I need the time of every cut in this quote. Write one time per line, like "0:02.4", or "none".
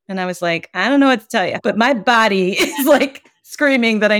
0:01.6